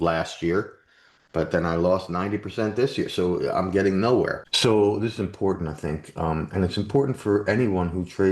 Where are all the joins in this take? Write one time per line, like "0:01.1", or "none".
0:04.4

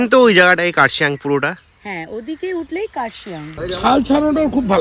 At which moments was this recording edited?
0:03.4

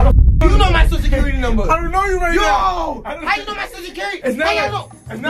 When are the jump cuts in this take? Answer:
none

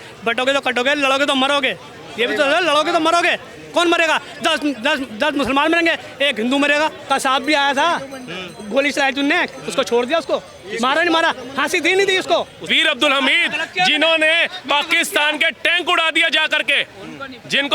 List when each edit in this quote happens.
0:07.0
0:12.6

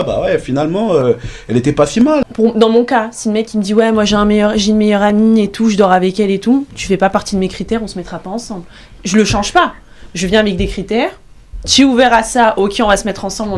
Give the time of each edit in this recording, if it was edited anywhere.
0:02.3

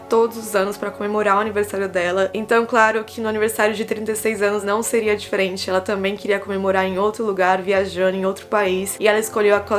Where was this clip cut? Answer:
none

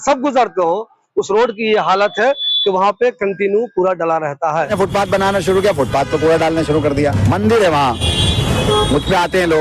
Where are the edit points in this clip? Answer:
0:04.7

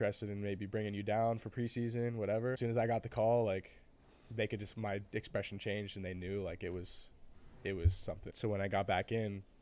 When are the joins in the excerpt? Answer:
0:02.6
0:08.3

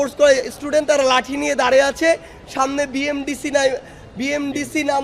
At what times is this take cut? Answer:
none

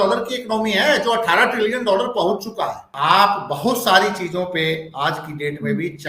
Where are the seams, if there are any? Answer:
0:02.9

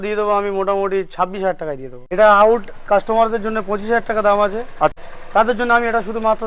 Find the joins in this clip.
0:01.9
0:04.9

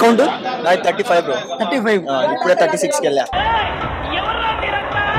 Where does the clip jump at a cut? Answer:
none

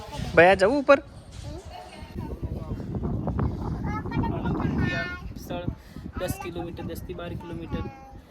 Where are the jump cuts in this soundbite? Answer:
0:02.2

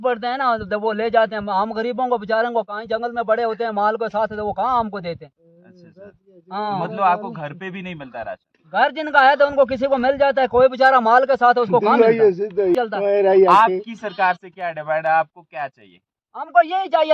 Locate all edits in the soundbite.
0:12.7

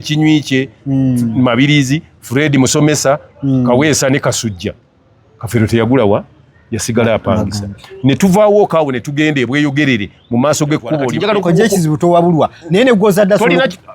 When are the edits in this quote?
0:11.1

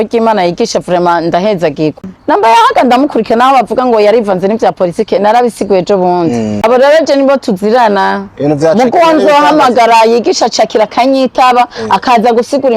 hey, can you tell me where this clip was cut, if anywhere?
0:02.1
0:06.6

